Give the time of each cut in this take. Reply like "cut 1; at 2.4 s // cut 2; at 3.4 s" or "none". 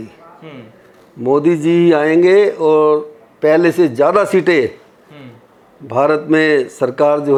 none